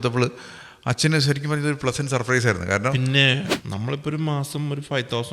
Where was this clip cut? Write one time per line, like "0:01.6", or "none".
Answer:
0:03.4